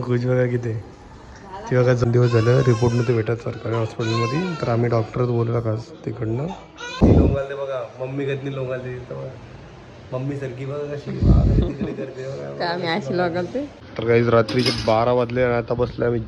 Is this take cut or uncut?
cut